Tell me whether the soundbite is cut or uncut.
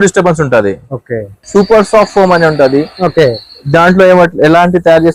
cut